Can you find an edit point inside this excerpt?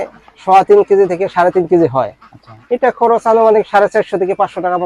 no; 0 cuts

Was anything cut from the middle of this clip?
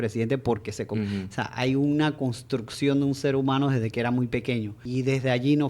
yes; 1 cut; at 4.8 s

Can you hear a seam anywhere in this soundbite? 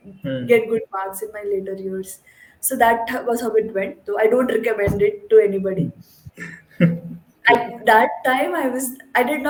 no; 0 cuts

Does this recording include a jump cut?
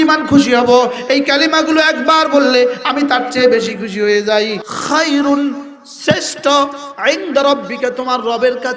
yes; 1 cut; at 4.7 s

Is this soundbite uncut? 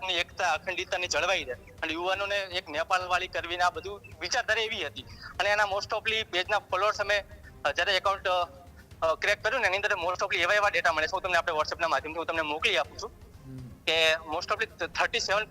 yes; 0 cuts

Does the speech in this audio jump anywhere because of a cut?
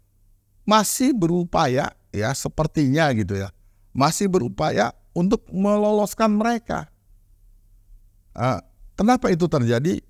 no; 0 cuts

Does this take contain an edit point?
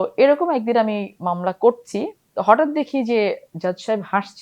yes; 1 cut; at 2.2 s

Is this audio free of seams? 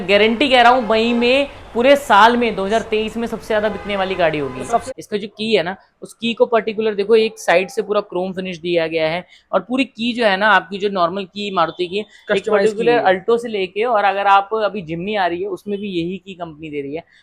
no; 1 cut; at 4.8 s

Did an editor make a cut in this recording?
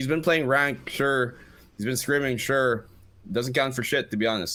no; 0 cuts

